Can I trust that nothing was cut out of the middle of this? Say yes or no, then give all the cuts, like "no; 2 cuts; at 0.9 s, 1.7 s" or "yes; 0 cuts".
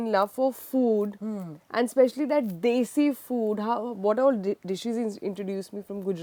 yes; 0 cuts